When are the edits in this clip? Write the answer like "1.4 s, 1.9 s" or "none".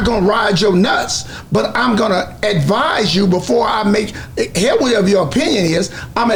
none